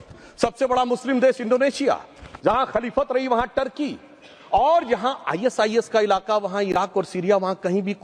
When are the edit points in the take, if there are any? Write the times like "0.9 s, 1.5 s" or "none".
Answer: none